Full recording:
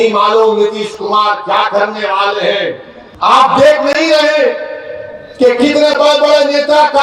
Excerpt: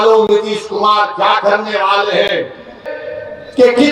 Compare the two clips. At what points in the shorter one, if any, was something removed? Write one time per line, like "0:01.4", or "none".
0:02.8